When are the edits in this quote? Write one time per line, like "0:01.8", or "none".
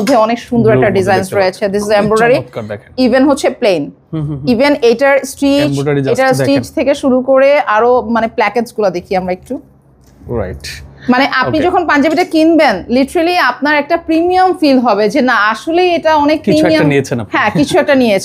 none